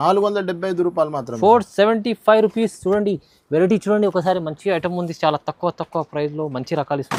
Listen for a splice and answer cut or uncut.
uncut